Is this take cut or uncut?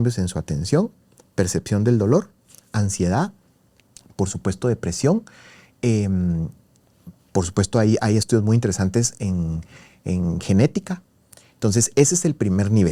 uncut